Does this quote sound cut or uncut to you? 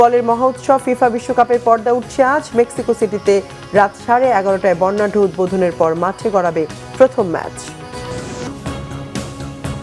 cut